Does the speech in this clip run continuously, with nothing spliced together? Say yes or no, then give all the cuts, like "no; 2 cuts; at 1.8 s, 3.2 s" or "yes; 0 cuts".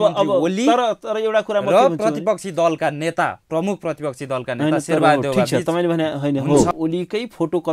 no; 1 cut; at 6.7 s